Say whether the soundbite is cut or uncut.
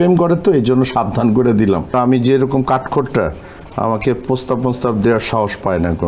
cut